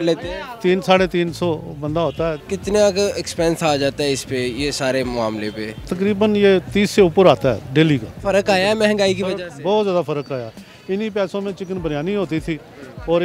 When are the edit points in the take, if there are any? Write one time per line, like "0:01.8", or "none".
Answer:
0:02.4
0:05.8
0:08.1